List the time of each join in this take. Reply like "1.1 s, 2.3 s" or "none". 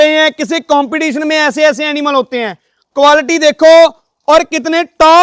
none